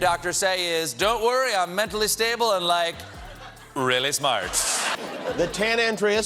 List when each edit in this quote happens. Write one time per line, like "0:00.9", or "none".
0:04.9

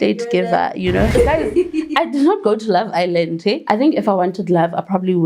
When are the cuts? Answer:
0:01.1
0:03.6

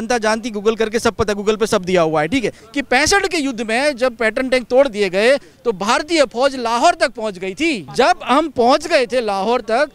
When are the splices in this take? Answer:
0:02.7
0:07.8

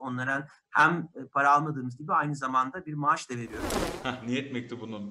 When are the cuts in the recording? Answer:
0:03.6

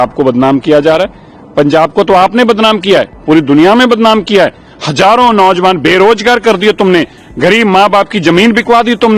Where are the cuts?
none

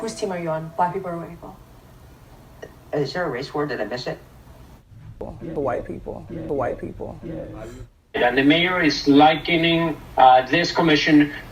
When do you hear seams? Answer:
none

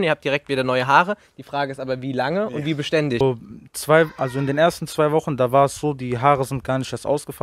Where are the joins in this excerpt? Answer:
0:03.2

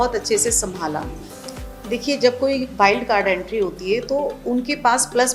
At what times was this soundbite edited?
0:01.2

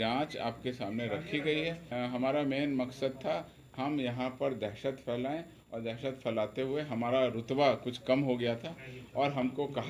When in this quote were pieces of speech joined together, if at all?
0:01.9

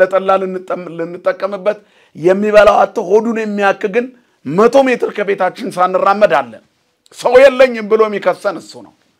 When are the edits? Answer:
none

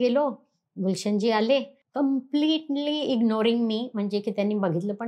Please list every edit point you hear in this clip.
0:01.8

